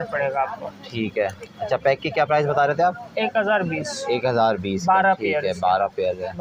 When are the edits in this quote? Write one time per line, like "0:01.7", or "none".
none